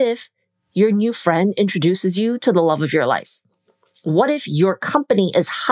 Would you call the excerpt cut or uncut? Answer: uncut